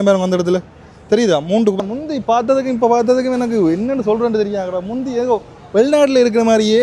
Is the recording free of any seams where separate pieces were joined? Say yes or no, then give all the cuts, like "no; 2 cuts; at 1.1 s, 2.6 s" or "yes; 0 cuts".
no; 1 cut; at 1.8 s